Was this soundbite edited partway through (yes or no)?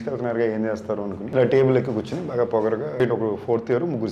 yes